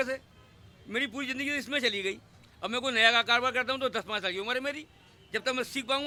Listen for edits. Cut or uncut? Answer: uncut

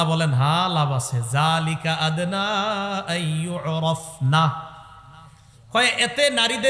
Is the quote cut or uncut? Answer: uncut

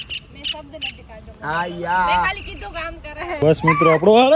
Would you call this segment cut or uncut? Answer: cut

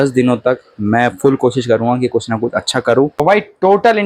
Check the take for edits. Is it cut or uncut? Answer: cut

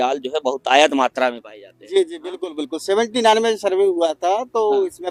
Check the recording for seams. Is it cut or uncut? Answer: uncut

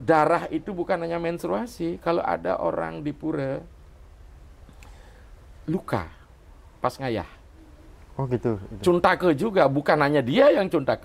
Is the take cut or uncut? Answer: uncut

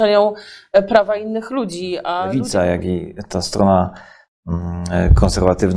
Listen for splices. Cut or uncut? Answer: cut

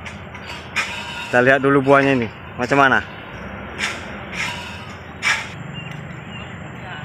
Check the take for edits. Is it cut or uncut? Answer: cut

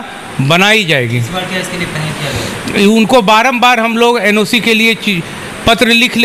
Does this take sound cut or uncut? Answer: uncut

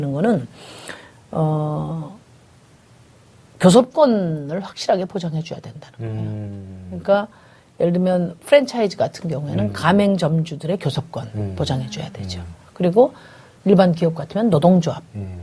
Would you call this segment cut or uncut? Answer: cut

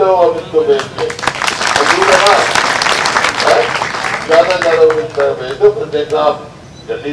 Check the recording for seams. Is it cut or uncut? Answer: uncut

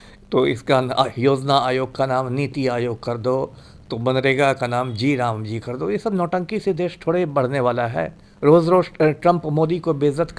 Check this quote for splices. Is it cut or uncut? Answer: uncut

